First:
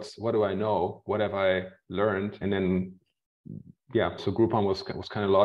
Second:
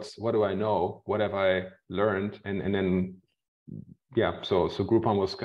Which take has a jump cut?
first; 2 cuts; at 2.4 s, 4.2 s

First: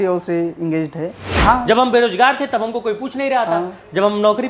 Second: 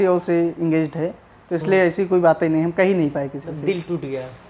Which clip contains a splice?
first; 1 cut; at 1.3 s

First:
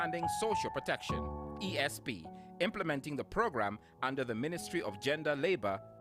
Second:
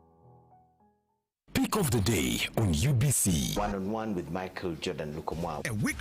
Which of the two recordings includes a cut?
second; 1 cut; at 1.3 s

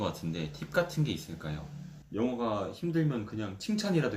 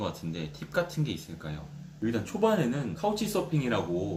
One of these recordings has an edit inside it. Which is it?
first; 1 cut; at 1.9 s

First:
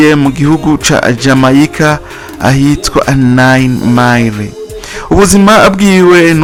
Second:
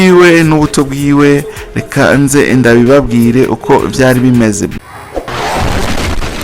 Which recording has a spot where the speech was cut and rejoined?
second; 1 cut; at 4.7 s

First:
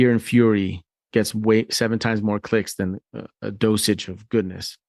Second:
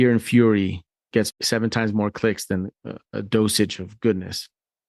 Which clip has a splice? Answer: second; 1 cut; at 1.4 s

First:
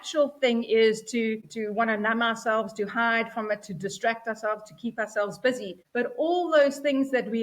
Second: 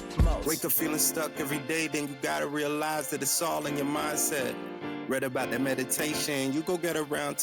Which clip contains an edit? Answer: first; 2 cuts; at 1.5 s, 5.8 s

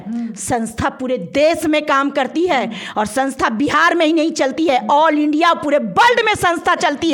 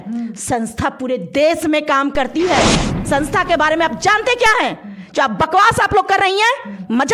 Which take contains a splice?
second; 1 cut; at 2.8 s

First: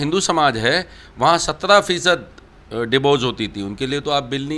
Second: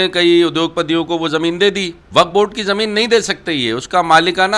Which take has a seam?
second; 1 cut; at 1.9 s

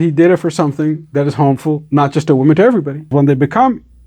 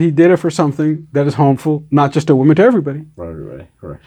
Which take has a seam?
first; 1 cut; at 3.1 s

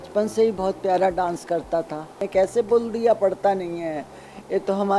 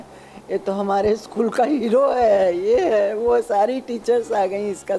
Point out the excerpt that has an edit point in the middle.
first; 1 cut; at 2.2 s

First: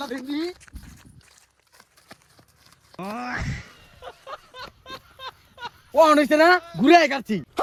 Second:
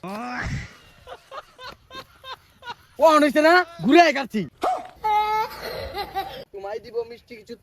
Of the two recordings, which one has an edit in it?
second; 1 cut; at 6.4 s

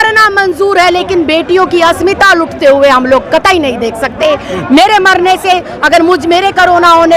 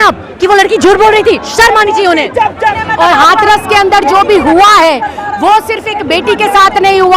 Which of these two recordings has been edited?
second; 1 cut; at 2.8 s

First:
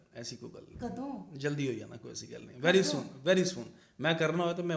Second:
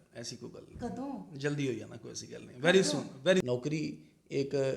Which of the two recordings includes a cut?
second; 1 cut; at 3.1 s

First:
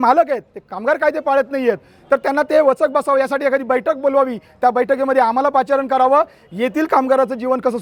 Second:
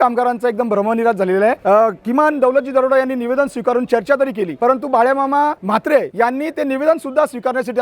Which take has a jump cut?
second; 3 cuts; at 1.6 s, 4.5 s, 5.9 s

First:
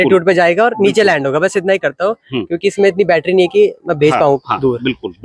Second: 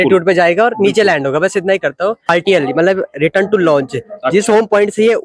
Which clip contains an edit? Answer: second; 1 cut; at 2.3 s

